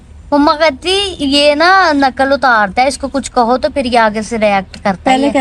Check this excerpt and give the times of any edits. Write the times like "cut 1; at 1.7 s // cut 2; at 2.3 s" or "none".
none